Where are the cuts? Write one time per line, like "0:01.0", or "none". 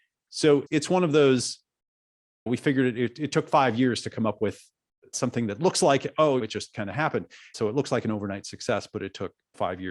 0:07.4

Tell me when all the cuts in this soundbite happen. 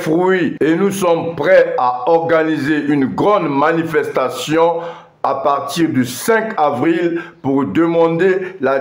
none

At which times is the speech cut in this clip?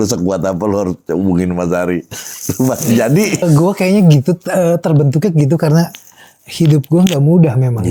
0:03.4

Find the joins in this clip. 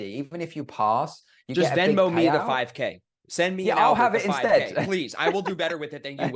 none

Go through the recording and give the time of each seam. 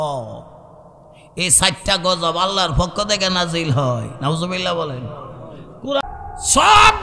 0:06.0

